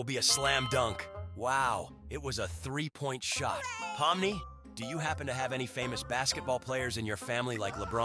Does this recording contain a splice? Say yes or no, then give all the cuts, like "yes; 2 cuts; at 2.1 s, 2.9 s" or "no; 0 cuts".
no; 0 cuts